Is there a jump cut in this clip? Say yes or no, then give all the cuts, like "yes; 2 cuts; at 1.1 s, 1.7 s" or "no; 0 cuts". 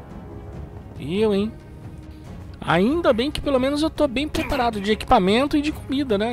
yes; 1 cut; at 1.0 s